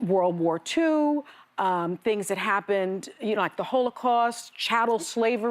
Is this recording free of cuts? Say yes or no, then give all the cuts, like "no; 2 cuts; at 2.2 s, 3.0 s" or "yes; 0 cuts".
yes; 0 cuts